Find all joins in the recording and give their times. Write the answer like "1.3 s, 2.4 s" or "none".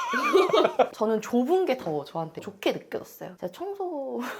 0.9 s, 3.4 s